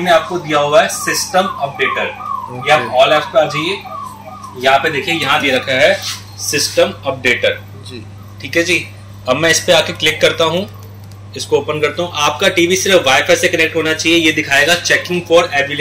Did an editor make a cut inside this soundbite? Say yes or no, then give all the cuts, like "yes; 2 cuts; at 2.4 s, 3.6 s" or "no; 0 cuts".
no; 0 cuts